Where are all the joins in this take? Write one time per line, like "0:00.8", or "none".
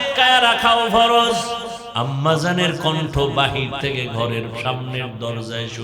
0:01.8